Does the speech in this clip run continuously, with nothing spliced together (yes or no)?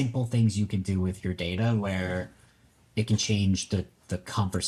yes